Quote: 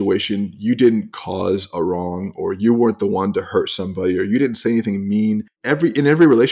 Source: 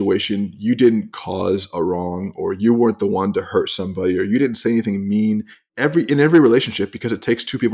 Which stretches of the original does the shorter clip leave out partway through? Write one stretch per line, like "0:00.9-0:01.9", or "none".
0:05.5-0:05.7